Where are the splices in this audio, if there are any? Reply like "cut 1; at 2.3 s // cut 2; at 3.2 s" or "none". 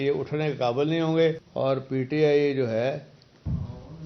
cut 1; at 1.4 s